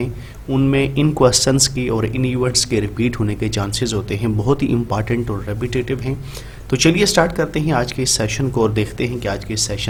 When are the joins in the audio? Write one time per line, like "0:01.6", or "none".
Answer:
none